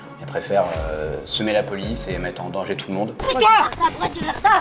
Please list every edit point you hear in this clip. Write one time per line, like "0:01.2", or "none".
0:03.2